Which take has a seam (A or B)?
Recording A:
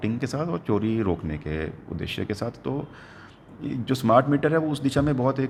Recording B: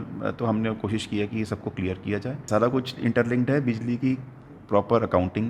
B